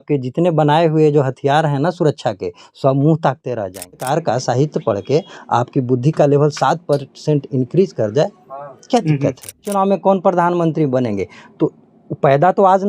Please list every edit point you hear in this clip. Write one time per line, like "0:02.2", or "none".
0:04.0
0:09.7